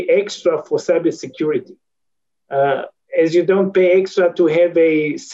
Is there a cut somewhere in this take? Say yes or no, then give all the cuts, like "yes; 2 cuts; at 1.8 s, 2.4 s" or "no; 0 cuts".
no; 0 cuts